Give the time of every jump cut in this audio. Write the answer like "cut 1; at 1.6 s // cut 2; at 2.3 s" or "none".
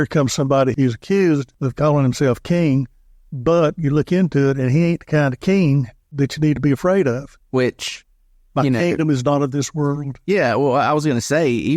cut 1; at 0.7 s // cut 2; at 1.6 s // cut 3; at 6.1 s